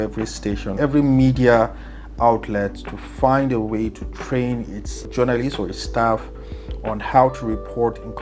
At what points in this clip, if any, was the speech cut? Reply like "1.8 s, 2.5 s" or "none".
0.8 s, 5.0 s